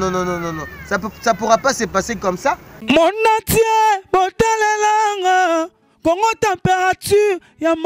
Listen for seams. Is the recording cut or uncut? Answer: cut